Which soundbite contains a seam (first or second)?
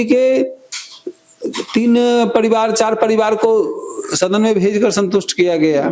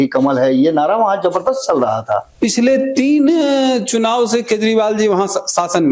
second